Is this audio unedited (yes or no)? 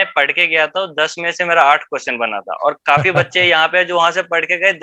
yes